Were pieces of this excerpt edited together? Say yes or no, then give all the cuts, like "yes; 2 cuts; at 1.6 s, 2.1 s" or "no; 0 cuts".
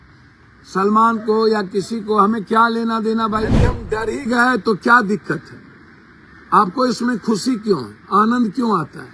yes; 1 cut; at 3.6 s